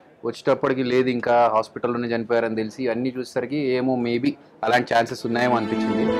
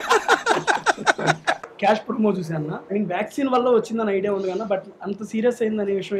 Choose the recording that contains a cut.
second; 2 cuts; at 1.6 s, 2.9 s

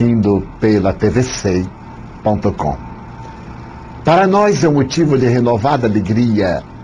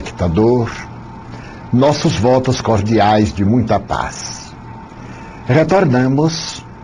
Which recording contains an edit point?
first; 1 cut; at 4.9 s

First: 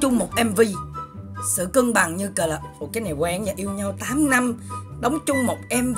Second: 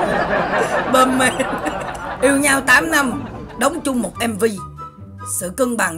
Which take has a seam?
second; 1 cut; at 2.1 s

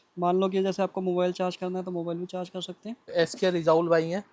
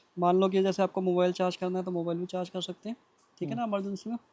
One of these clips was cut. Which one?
first; 1 cut; at 3.1 s

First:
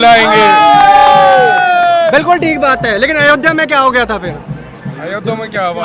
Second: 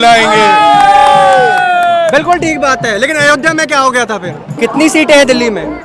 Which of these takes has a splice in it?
second; 1 cut; at 4.4 s

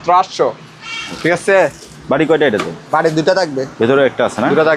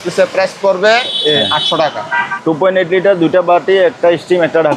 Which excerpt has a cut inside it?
second; 1 cut; at 2.3 s

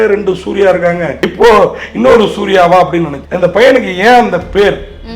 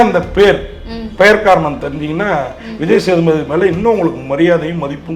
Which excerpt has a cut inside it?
first; 2 cuts; at 1.2 s, 3.2 s

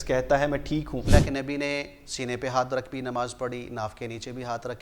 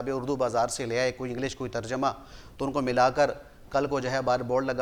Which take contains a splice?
first; 1 cut; at 1.1 s

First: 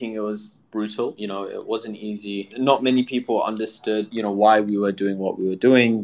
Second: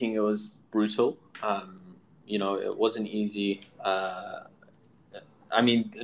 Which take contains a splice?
first; 3 cuts; at 1.2 s, 2.5 s, 4.1 s

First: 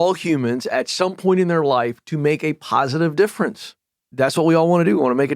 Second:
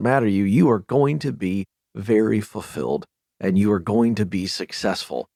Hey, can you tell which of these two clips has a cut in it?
first; 1 cut; at 4.1 s

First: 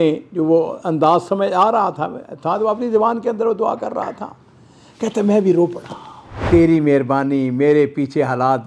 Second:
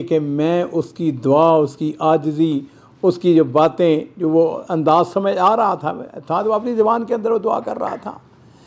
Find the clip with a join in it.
first; 1 cut; at 6.4 s

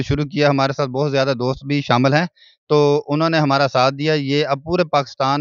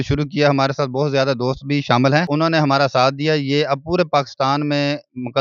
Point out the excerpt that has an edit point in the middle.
second; 1 cut; at 2.3 s

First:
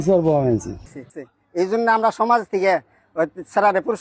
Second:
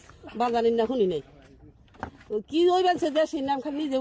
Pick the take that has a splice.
first; 1 cut; at 0.9 s

